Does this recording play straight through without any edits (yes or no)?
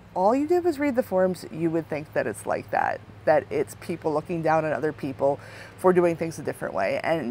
yes